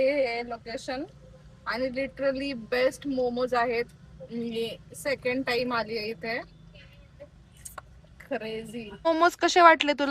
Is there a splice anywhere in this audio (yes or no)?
yes